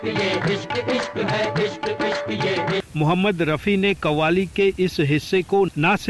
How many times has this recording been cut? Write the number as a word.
one